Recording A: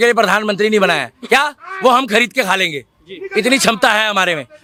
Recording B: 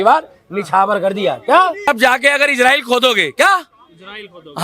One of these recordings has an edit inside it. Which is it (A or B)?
B